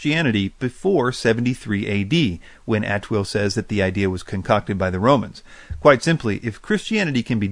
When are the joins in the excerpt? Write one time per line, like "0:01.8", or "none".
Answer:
0:01.7